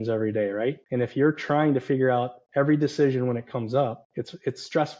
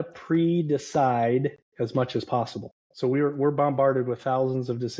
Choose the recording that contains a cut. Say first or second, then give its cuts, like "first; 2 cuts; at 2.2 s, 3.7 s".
first; 3 cuts; at 0.8 s, 2.4 s, 4.0 s